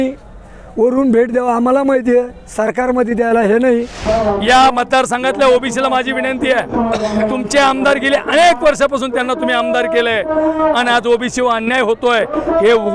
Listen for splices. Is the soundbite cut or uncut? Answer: cut